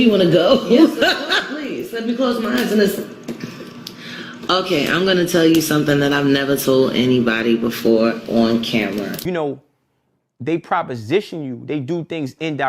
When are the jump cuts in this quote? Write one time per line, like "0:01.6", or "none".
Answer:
0:09.1